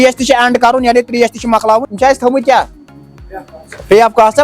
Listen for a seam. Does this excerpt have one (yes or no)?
yes